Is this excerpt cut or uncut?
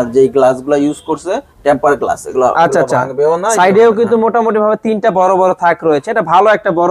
uncut